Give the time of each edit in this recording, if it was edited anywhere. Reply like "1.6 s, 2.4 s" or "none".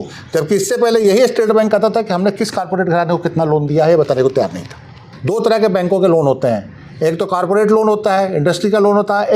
5.1 s